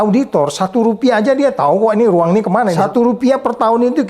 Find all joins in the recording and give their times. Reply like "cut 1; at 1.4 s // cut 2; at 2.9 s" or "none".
cut 1; at 2.7 s

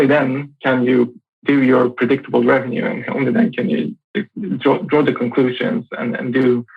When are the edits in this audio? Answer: cut 1; at 1.3 s

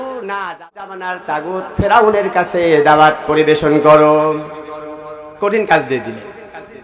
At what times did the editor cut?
cut 1; at 1.0 s

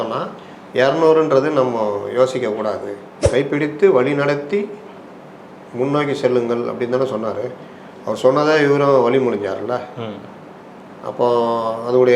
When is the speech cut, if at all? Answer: cut 1; at 3.2 s

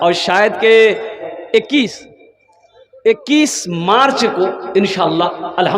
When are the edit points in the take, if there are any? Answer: cut 1; at 1.3 s

